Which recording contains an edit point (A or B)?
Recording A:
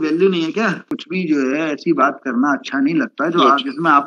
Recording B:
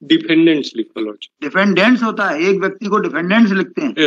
A